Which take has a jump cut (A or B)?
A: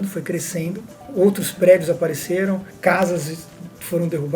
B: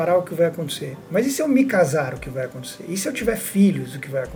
A